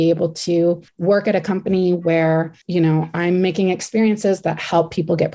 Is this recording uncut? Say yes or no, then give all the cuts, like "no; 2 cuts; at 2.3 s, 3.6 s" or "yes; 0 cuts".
no; 2 cuts; at 0.9 s, 2.6 s